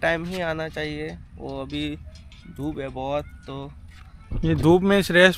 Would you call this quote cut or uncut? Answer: uncut